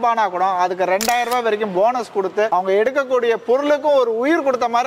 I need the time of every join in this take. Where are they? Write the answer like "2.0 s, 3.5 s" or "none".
2.5 s